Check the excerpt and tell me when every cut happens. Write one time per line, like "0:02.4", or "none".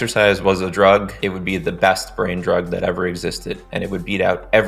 0:01.2